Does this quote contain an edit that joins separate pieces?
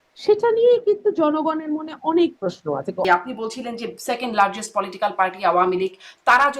yes; 1 cut; at 3.0 s

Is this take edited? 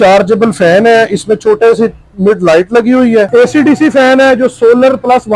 yes; 1 cut; at 3.3 s

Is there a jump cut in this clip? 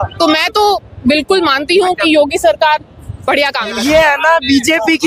yes; 1 cut; at 3.7 s

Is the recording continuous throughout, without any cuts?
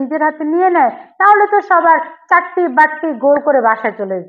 yes; 0 cuts

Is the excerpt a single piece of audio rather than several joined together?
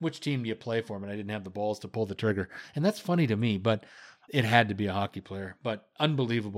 yes; 0 cuts

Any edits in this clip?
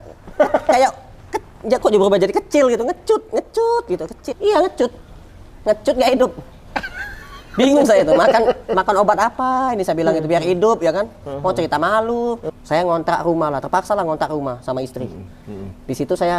yes; 2 cuts; at 4.3 s, 12.4 s

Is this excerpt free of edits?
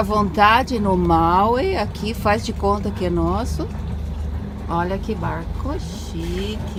yes; 0 cuts

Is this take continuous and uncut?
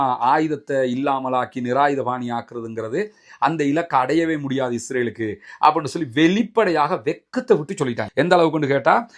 yes; 0 cuts

